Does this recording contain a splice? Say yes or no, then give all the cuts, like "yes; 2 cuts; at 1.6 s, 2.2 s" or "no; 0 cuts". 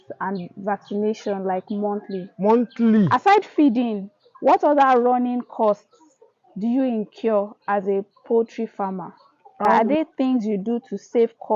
yes; 2 cuts; at 3.1 s, 9.7 s